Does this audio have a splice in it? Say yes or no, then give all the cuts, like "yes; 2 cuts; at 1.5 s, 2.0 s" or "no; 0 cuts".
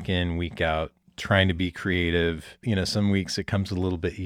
yes; 1 cut; at 2.6 s